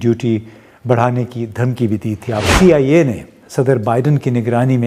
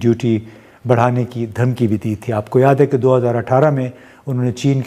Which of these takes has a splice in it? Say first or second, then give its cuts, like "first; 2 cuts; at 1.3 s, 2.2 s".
first; 1 cut; at 2.4 s